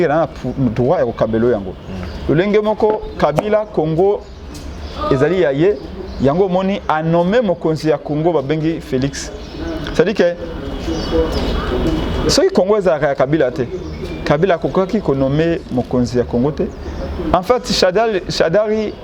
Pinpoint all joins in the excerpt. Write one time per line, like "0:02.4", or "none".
none